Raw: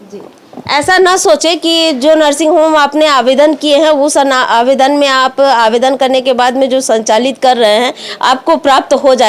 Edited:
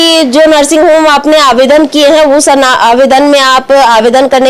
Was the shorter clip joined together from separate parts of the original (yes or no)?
no